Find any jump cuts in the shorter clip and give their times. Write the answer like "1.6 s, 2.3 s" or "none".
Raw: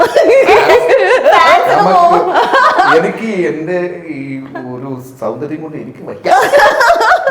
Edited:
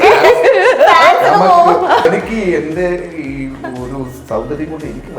2.1 s